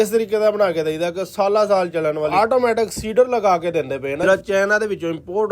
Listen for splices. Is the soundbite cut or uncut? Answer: cut